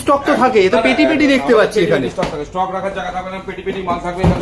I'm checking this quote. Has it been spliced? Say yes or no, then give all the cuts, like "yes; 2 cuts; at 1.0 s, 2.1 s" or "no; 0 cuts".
no; 0 cuts